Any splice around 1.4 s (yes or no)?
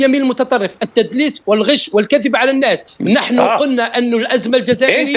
no